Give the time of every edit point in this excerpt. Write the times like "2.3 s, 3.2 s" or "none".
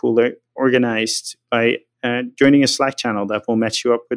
1.9 s